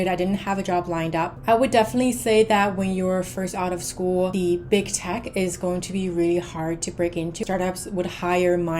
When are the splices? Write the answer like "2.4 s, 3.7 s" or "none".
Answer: 1.3 s, 4.3 s, 7.4 s